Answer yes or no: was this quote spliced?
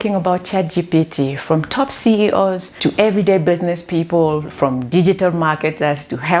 no